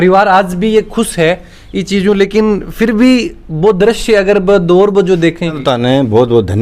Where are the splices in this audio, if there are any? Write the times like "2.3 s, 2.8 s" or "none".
5.6 s